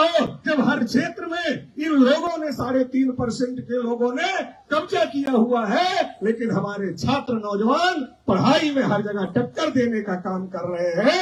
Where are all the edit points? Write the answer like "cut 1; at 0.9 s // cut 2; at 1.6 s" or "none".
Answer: none